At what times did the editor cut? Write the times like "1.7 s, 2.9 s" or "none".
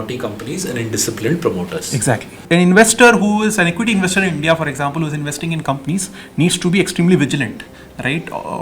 2.4 s